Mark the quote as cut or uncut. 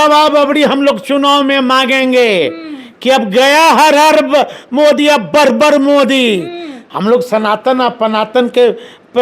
cut